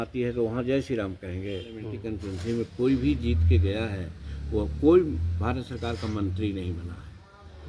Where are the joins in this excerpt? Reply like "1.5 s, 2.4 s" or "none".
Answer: 1.9 s